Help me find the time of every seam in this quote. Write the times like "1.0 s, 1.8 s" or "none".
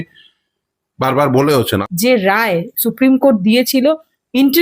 1.9 s